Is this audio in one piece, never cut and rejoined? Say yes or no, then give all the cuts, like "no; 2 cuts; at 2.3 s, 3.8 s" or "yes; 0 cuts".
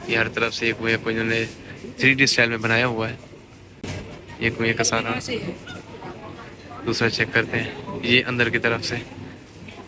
yes; 0 cuts